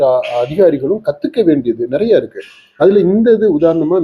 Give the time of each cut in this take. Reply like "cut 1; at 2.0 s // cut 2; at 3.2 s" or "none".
none